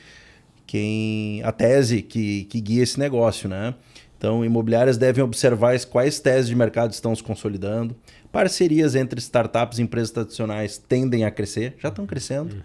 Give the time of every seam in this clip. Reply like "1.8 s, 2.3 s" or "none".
none